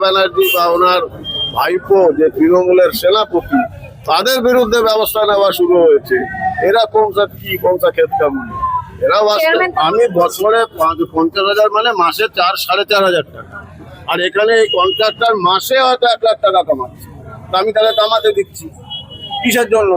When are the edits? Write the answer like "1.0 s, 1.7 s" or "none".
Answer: 9.7 s